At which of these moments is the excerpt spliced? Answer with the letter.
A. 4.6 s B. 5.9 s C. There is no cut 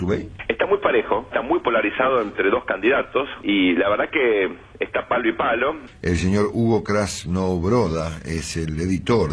B